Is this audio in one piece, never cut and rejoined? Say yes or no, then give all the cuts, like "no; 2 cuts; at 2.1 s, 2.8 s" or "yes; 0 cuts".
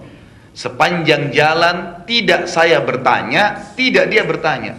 yes; 0 cuts